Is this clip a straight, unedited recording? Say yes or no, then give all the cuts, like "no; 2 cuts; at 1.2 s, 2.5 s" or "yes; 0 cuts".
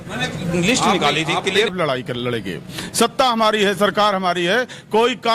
no; 1 cut; at 1.7 s